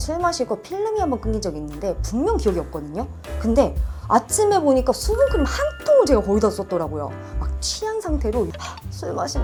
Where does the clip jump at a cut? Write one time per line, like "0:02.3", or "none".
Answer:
none